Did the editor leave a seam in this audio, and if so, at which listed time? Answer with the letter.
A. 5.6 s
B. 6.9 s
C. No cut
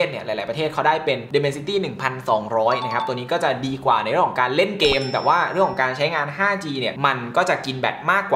B